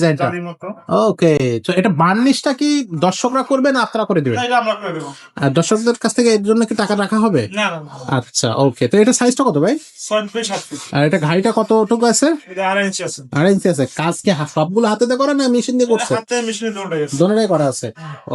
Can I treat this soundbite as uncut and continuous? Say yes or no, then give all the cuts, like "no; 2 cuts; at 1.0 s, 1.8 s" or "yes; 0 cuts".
yes; 0 cuts